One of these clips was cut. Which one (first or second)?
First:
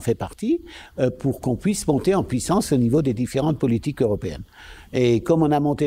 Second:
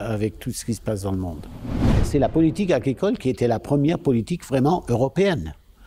second